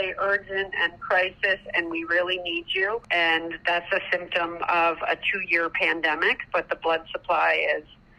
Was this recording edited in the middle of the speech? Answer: no; 0 cuts

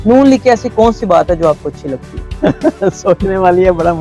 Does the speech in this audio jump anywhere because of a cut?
yes; 1 cut; at 2.2 s

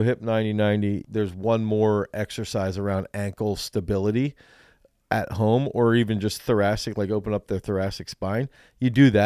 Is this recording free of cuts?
no; 1 cut; at 1.0 s

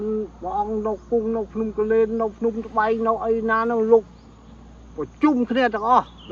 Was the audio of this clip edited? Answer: no; 0 cuts

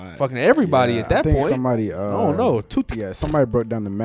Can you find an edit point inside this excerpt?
no; 0 cuts

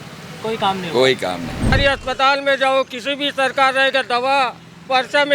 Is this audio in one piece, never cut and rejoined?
no; 1 cut; at 1.7 s

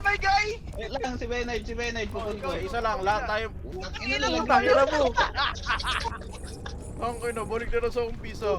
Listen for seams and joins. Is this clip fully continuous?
yes; 0 cuts

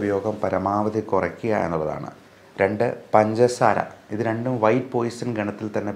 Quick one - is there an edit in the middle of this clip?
no; 0 cuts

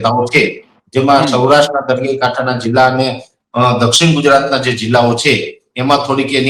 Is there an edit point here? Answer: no; 0 cuts

